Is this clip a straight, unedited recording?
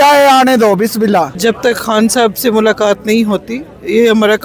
no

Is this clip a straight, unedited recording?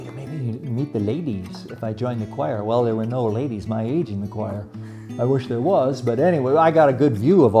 yes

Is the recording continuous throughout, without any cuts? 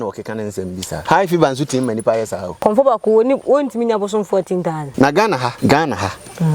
no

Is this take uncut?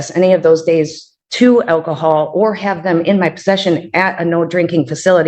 yes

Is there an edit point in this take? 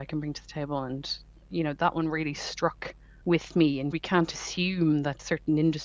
yes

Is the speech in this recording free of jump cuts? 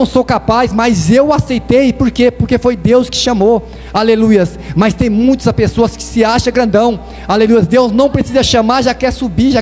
yes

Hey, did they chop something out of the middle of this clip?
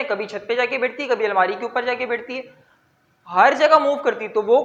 no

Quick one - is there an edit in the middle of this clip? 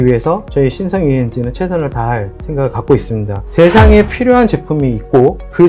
yes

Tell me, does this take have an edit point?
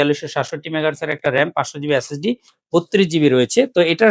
no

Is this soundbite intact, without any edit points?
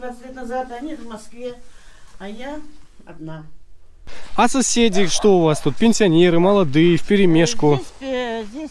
no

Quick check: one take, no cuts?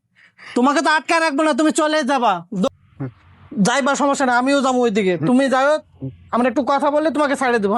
no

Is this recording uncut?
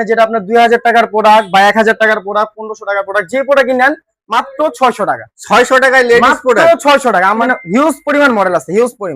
no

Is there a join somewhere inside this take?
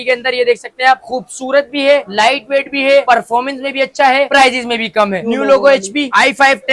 yes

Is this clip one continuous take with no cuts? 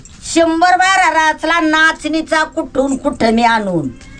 yes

